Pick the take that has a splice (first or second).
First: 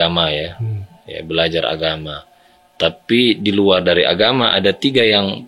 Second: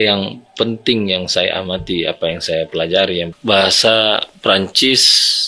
second